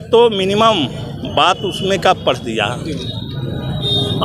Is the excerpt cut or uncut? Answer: uncut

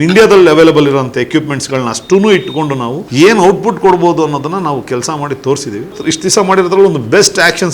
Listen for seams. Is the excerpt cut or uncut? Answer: cut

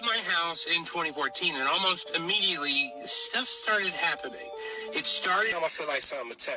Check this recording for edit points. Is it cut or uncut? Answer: cut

